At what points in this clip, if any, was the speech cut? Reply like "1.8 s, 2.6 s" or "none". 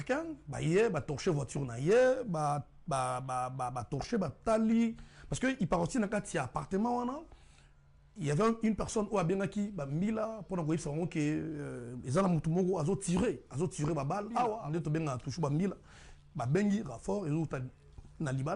14.6 s

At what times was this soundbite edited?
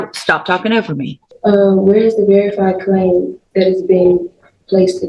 1.2 s

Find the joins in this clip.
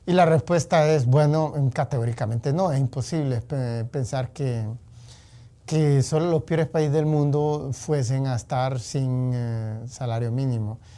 none

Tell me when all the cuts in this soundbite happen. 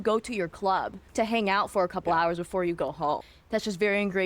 1.0 s, 3.3 s

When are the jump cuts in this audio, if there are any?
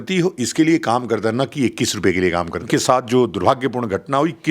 2.7 s

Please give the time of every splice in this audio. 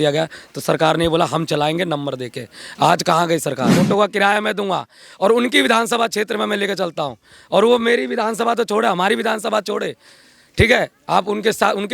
3.8 s

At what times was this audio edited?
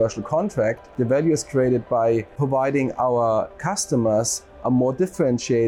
0.9 s, 2.4 s

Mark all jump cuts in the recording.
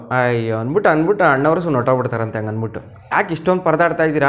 3.0 s

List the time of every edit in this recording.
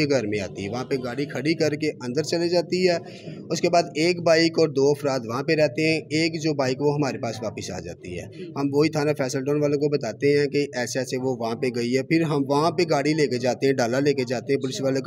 none

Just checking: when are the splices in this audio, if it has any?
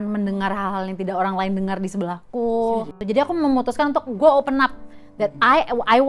3.0 s

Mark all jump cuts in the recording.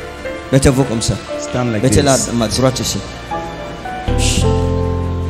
4.1 s

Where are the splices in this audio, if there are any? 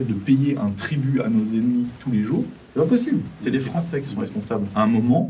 3.3 s

